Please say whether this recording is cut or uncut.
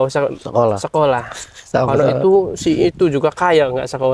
uncut